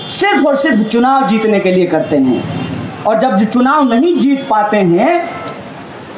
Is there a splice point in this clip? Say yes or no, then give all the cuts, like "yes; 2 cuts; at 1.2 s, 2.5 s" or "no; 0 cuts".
no; 0 cuts